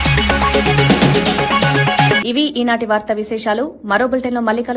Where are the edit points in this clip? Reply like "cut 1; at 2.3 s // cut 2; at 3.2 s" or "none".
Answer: none